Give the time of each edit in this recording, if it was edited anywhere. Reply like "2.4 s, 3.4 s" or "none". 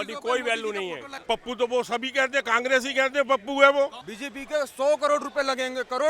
1.2 s, 4.1 s